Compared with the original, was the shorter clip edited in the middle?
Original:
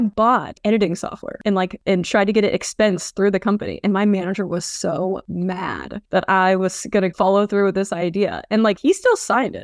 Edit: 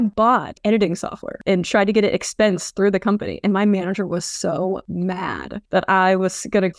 yes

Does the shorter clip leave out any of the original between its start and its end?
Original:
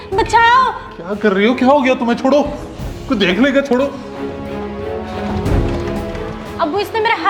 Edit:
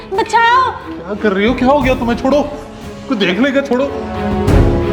yes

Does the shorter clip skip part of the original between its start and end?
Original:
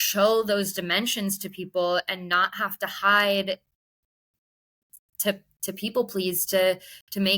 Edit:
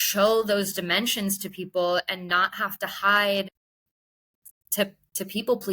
yes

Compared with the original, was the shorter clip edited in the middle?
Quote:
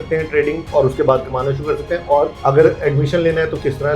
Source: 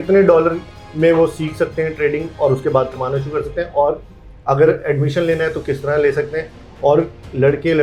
yes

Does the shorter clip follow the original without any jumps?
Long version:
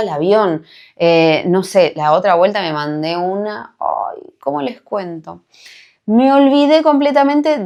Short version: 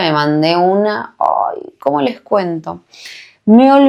yes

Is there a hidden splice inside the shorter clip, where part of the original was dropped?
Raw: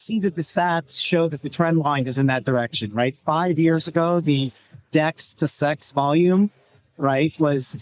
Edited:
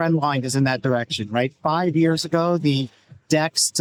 no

